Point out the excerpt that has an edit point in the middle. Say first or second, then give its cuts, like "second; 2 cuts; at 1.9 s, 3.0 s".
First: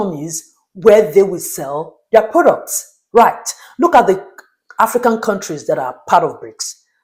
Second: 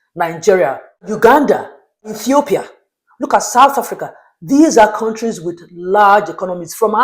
second; 2 cuts; at 1.1 s, 2.2 s